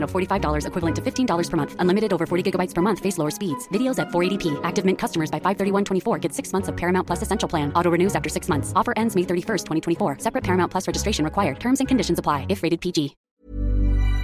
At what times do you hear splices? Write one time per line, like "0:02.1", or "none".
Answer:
0:13.2